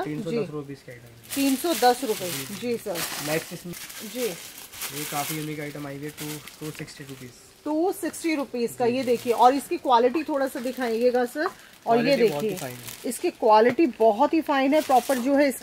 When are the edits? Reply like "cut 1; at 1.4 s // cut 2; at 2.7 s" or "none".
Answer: none